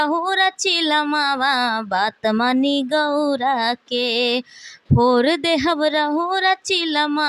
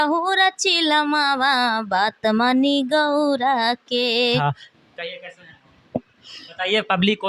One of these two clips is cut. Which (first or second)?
second